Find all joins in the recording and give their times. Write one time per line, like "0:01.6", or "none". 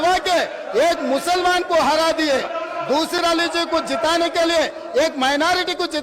0:03.2

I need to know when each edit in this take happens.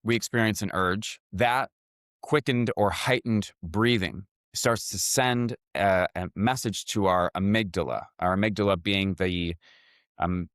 0:01.2

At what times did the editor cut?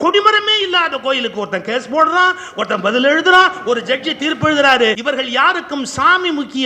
0:05.0

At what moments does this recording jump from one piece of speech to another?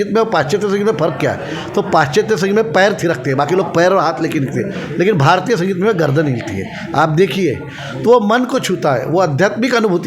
none

